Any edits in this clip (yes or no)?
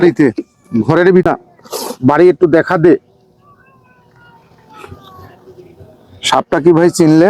yes